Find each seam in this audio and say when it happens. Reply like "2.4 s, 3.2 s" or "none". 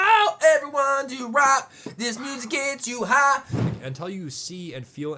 3.7 s